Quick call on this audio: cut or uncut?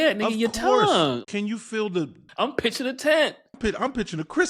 cut